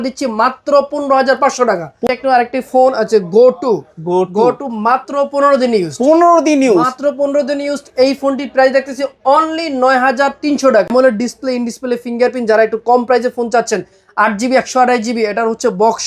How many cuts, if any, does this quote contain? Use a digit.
2